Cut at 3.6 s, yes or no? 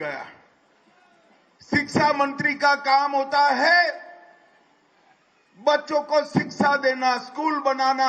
yes